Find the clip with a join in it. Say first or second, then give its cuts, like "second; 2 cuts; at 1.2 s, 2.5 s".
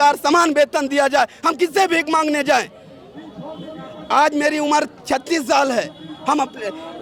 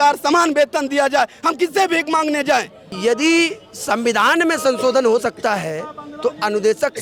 second; 1 cut; at 2.8 s